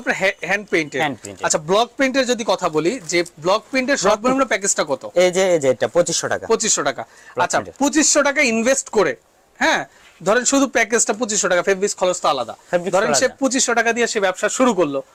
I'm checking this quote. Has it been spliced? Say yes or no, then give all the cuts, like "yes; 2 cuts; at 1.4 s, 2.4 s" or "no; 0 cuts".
no; 0 cuts